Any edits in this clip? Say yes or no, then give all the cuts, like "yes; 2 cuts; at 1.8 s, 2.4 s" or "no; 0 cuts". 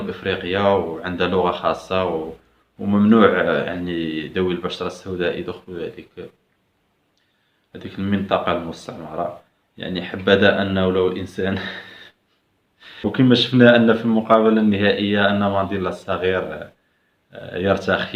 yes; 1 cut; at 13.0 s